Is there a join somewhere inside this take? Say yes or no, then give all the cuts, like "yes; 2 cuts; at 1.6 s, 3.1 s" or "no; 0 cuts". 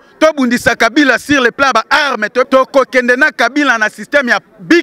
yes; 1 cut; at 2.5 s